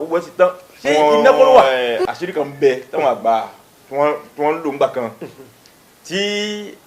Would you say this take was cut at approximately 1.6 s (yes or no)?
yes